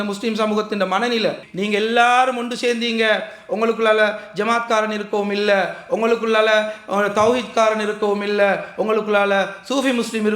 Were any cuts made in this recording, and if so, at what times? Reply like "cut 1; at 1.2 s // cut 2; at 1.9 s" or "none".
cut 1; at 1.4 s